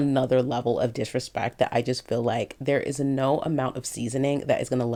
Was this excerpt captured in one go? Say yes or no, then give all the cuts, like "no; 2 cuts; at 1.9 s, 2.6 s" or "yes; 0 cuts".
yes; 0 cuts